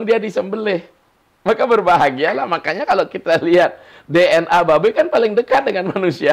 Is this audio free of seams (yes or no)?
yes